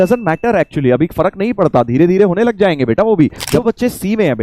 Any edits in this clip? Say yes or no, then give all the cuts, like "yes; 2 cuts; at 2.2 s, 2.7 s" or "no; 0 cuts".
yes; 1 cut; at 3.5 s